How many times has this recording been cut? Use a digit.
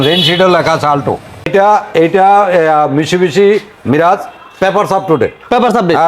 1